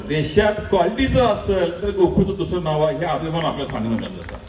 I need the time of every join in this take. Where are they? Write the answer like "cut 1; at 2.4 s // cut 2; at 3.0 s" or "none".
none